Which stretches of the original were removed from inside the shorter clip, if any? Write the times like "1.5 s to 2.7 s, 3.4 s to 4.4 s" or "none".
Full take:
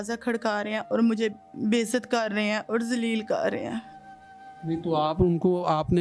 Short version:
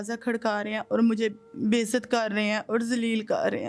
none

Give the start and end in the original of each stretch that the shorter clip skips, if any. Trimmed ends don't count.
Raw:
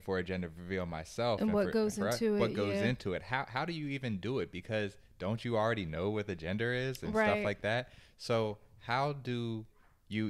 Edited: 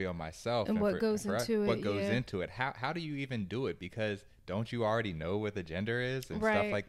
none

